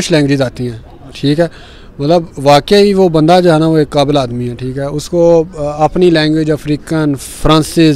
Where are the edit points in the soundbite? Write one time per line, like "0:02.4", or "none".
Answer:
none